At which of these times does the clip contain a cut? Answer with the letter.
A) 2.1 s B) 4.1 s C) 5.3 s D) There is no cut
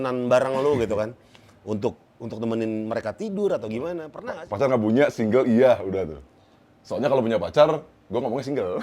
B